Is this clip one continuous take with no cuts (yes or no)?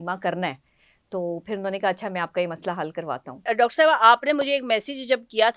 yes